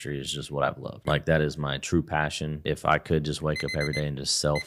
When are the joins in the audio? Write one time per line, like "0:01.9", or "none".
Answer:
0:00.9
0:02.6